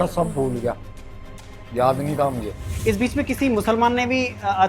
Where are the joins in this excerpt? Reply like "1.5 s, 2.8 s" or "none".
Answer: 2.7 s